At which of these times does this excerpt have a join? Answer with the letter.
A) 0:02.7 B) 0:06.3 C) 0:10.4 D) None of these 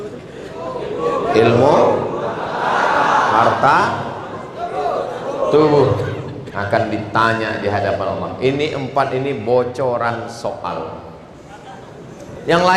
D